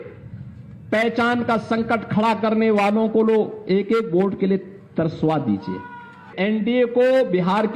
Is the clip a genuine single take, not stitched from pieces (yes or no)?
no